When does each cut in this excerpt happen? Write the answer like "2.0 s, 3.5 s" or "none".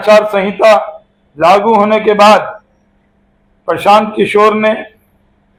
none